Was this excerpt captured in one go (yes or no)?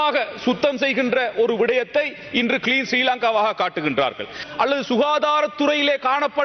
no